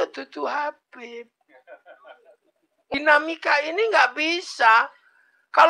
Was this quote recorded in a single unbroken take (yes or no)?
no